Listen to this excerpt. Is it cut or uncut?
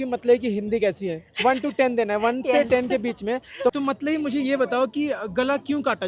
cut